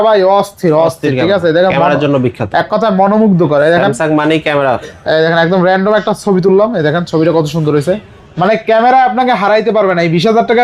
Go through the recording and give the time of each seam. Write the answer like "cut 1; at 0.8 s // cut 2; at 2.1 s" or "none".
none